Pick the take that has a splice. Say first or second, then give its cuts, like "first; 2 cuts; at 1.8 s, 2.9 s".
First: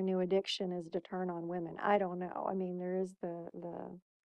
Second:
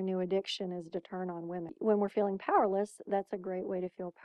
second; 1 cut; at 1.7 s